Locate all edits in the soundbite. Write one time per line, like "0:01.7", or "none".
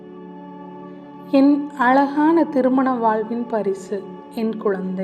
0:01.3